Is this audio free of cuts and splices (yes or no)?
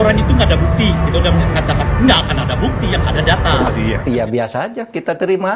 no